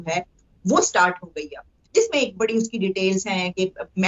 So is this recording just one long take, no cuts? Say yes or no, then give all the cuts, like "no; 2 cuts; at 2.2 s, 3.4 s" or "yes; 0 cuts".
yes; 0 cuts